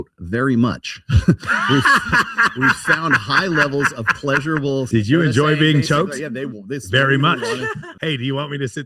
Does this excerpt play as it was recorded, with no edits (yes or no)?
no